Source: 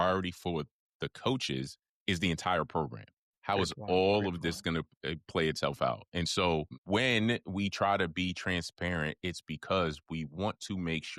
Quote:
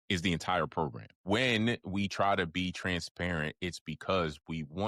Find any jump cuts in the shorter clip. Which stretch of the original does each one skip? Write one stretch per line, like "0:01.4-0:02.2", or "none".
0:03.1-0:06.7